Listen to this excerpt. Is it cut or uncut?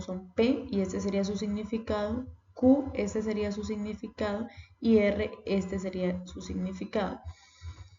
cut